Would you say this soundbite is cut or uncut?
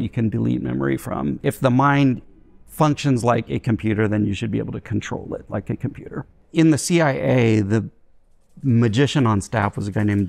cut